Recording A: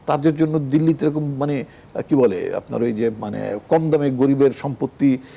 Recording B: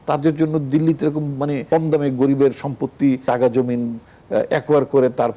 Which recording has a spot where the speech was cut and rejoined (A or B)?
B